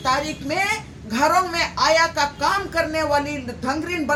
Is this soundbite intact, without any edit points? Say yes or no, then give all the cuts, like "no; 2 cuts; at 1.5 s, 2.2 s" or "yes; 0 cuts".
yes; 0 cuts